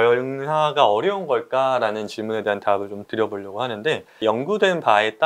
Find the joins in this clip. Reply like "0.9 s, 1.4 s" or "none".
none